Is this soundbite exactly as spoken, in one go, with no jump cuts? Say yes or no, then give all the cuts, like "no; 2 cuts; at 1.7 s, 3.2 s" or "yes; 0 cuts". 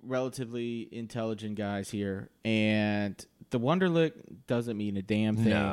yes; 0 cuts